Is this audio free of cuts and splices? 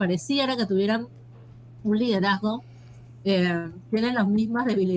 yes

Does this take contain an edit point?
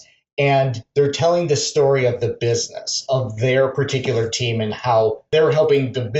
yes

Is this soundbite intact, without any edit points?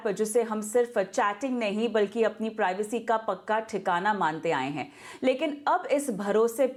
yes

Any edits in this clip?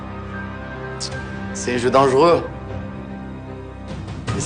no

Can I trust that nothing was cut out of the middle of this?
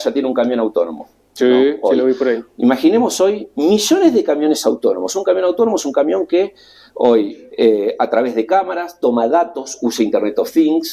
yes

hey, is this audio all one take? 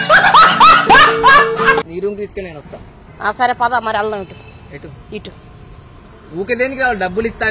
no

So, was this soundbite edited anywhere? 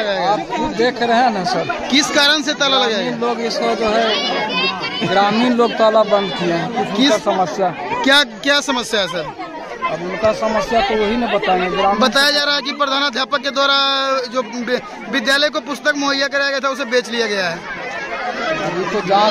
no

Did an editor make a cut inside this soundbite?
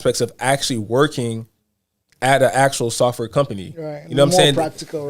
no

